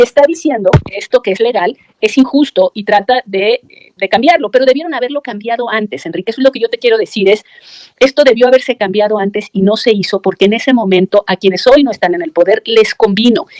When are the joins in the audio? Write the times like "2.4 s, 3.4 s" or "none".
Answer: none